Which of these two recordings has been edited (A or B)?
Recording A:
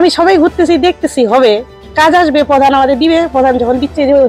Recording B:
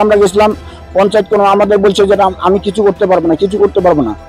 A